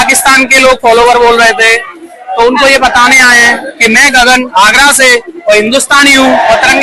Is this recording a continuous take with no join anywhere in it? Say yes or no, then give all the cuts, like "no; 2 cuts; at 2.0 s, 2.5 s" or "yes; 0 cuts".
yes; 0 cuts